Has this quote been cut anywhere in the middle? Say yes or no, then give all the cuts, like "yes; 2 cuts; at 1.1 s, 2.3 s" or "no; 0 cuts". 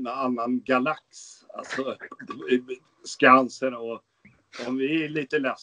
no; 0 cuts